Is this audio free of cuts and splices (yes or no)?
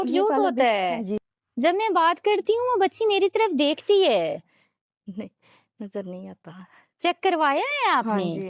no